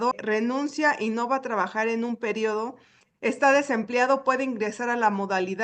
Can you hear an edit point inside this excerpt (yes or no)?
no